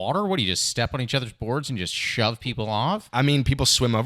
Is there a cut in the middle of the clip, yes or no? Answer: yes